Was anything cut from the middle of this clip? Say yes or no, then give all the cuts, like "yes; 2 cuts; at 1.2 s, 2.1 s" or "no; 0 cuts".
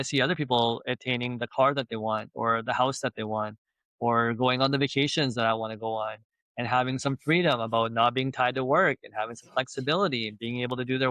no; 0 cuts